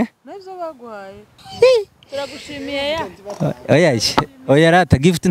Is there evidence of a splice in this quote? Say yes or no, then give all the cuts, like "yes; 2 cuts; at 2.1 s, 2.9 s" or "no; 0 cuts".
yes; 1 cut; at 1.4 s